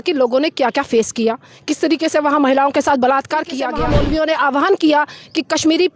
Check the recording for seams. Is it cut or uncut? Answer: cut